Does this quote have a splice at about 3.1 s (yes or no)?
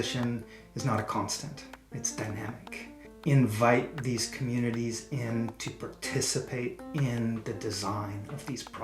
yes